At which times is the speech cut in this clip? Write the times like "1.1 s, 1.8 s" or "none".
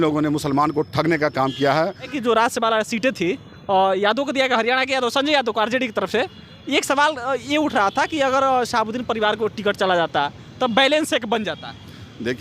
2.1 s